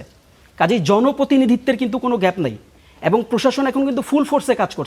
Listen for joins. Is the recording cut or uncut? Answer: uncut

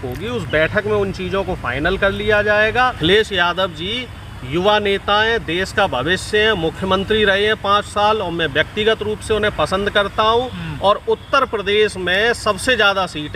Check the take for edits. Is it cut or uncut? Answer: cut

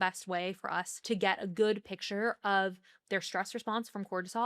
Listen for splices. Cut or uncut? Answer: cut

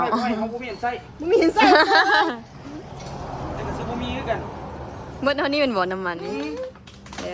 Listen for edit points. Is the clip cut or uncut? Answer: uncut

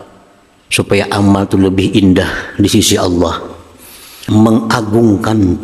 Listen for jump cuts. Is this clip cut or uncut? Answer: cut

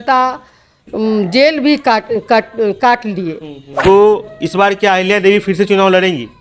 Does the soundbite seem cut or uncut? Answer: cut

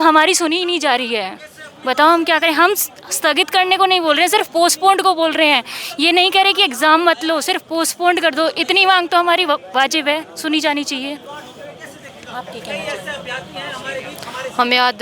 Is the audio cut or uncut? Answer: uncut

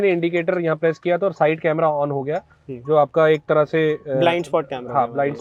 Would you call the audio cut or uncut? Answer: uncut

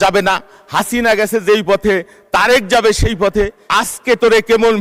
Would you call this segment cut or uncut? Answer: cut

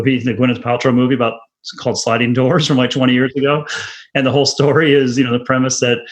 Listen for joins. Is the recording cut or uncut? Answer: uncut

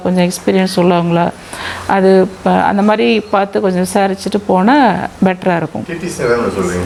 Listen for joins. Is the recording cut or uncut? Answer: uncut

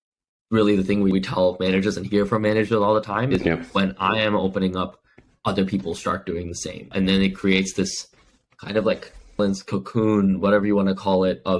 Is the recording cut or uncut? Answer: cut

